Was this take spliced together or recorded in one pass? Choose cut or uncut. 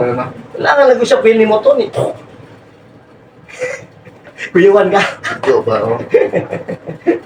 uncut